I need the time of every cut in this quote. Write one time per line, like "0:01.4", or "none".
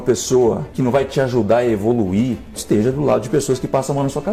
none